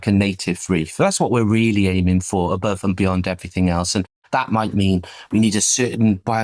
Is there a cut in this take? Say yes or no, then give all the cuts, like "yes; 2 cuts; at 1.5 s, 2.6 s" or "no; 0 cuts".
no; 0 cuts